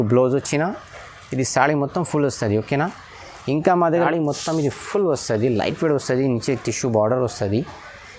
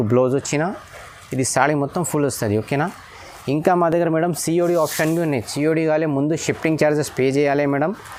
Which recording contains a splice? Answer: first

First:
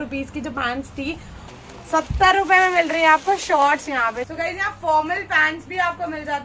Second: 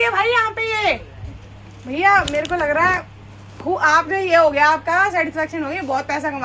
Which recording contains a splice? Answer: first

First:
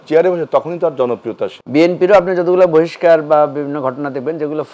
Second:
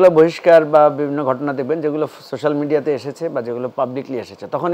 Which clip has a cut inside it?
first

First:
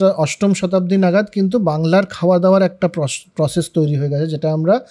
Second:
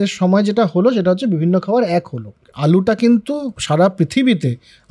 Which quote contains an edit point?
second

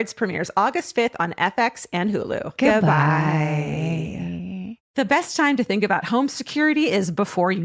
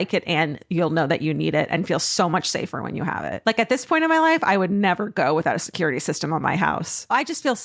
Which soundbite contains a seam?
first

